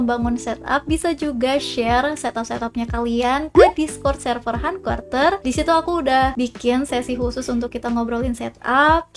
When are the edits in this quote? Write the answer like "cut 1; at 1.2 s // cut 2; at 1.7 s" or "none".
cut 1; at 5.4 s // cut 2; at 6.3 s

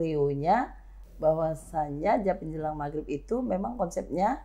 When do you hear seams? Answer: none

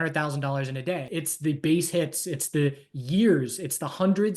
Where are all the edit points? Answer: cut 1; at 1.1 s

